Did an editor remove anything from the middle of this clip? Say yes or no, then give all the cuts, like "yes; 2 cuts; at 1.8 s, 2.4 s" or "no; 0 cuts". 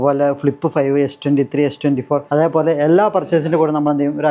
yes; 1 cut; at 2.2 s